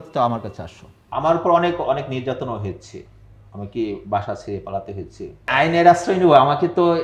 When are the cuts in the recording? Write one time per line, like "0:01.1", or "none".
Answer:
0:01.1
0:05.5

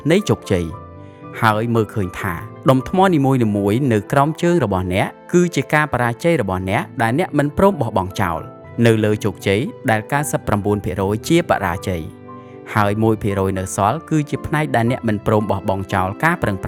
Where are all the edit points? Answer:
none

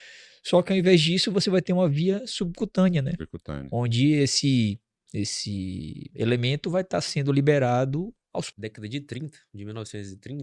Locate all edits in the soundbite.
0:08.5

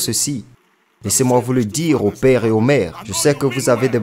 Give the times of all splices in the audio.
none

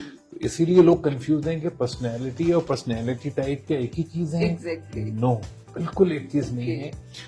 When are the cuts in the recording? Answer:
none

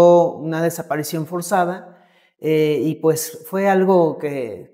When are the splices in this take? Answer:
none

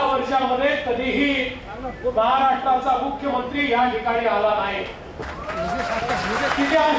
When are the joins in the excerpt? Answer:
none

